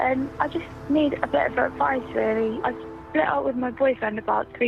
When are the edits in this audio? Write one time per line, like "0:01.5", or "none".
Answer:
0:02.6